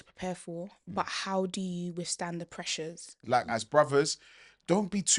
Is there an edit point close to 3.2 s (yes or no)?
yes